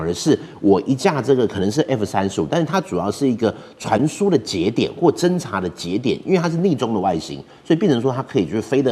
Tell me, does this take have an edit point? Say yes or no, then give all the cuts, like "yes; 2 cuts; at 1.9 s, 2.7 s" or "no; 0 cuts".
no; 0 cuts